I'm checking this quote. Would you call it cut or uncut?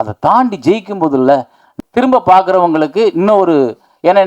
cut